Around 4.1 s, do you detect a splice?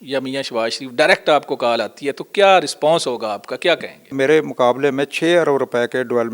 yes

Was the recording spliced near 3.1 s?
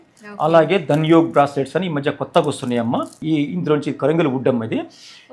yes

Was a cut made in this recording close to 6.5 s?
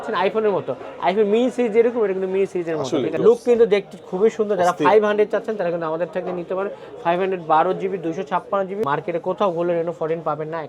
no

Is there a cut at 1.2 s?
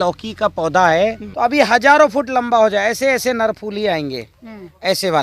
yes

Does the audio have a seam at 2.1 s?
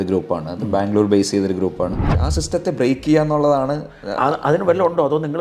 yes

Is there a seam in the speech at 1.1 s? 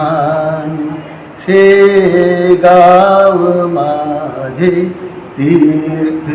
no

